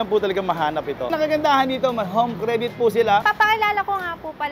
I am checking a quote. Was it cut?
yes; 2 cuts; at 1.1 s, 3.2 s

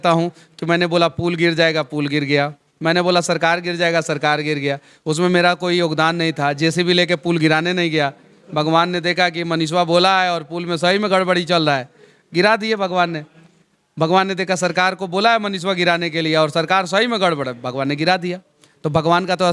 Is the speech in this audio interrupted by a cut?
no; 0 cuts

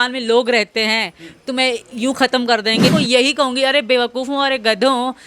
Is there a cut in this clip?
yes; 1 cut; at 2.9 s

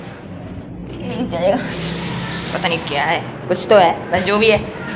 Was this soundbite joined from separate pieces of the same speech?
no; 0 cuts

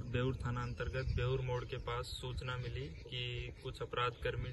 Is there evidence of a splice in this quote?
no; 0 cuts

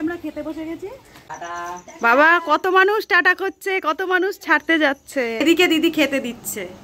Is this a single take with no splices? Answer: no; 2 cuts; at 1.1 s, 5.4 s

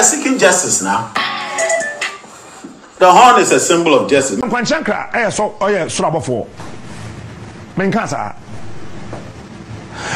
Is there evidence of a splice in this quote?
yes; 1 cut; at 4.4 s

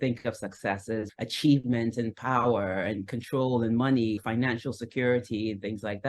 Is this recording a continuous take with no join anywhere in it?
no; 2 cuts; at 1.1 s, 4.2 s

